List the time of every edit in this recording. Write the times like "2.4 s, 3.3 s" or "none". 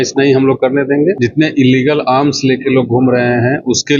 1.2 s